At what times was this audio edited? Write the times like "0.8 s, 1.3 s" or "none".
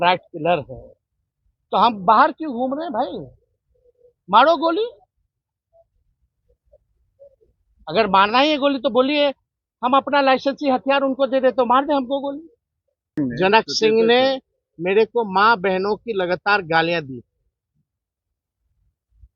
13.1 s